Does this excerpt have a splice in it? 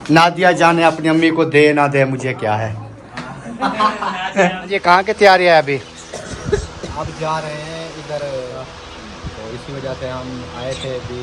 yes; 2 cuts; at 4.6 s, 8.5 s

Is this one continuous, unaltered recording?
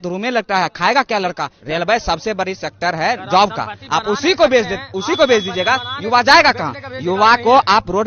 no; 1 cut; at 1.5 s

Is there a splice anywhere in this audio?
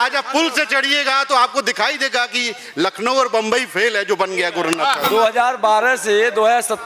yes; 1 cut; at 5.0 s

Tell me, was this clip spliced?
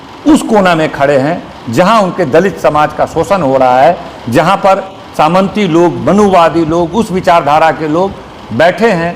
no; 0 cuts

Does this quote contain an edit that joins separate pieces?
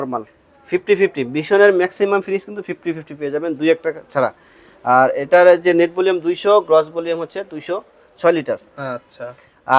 no; 0 cuts

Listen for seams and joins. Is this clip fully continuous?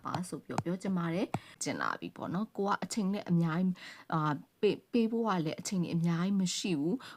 no; 1 cut; at 1.6 s

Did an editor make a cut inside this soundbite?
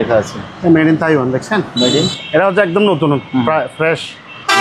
yes; 1 cut; at 2.1 s

